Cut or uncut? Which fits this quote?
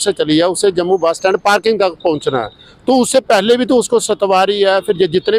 uncut